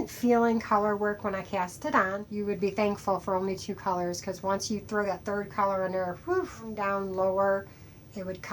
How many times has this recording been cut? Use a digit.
2